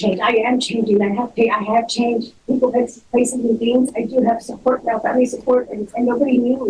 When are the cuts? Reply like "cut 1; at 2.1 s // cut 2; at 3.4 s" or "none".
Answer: none